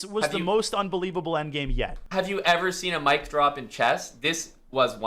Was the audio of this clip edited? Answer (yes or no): yes